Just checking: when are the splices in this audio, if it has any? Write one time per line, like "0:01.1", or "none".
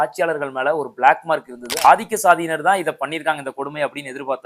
0:01.8